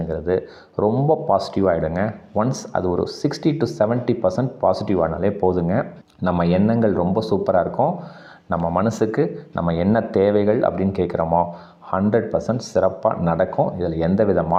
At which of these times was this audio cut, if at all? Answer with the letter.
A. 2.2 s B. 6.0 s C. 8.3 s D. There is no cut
D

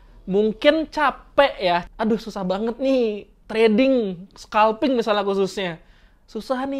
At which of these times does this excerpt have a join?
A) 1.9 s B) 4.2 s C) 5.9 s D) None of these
A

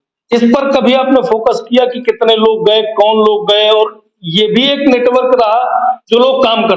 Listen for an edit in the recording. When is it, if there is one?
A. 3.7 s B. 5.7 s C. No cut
C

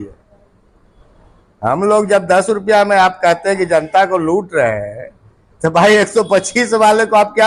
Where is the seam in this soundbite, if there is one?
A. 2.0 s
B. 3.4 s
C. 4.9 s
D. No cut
D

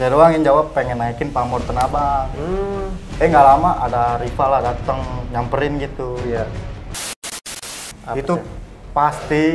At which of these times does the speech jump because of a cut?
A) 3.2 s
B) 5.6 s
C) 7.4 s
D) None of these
C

